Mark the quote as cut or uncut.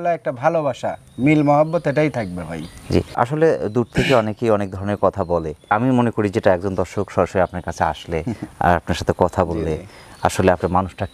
uncut